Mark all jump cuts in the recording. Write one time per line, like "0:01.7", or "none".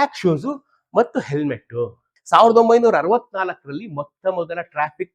0:02.1

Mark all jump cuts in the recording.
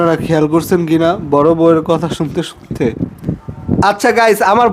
0:03.2

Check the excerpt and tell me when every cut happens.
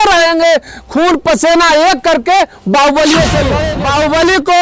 0:03.6

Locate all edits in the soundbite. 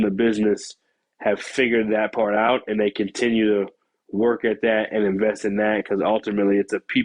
none

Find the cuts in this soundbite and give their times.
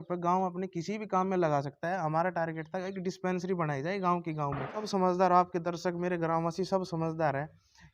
0:04.8

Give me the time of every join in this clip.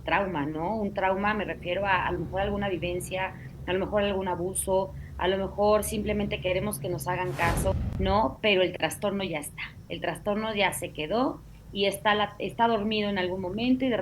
0:07.7

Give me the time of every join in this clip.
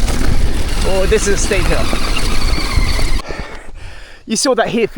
0:03.2

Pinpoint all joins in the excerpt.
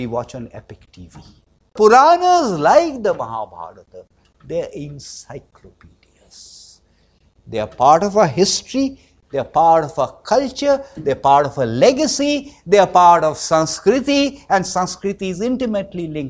0:01.7

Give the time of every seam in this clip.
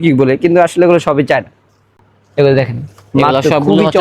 none

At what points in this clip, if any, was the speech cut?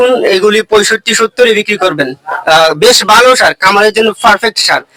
none

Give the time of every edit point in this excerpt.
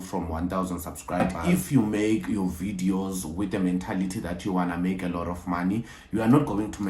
0:01.2

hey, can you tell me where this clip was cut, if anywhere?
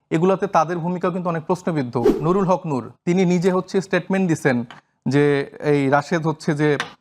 0:02.1

